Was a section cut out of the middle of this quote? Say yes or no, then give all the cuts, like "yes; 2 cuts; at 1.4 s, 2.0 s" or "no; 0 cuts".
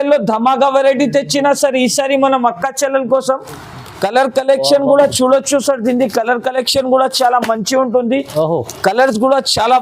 no; 0 cuts